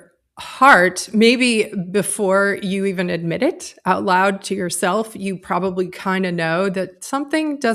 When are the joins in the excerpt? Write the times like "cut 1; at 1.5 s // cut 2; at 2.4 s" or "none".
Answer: none